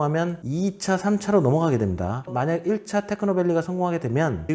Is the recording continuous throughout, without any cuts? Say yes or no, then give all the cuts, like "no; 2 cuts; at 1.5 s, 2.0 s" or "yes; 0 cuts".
yes; 0 cuts